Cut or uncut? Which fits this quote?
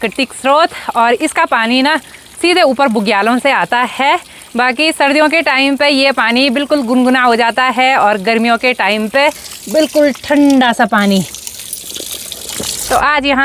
uncut